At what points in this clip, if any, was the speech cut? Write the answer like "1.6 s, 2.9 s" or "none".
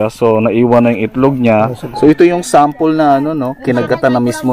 1.9 s